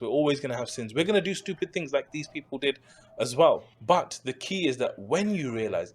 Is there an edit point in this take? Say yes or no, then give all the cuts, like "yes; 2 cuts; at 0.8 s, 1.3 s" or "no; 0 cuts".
yes; 1 cut; at 3.7 s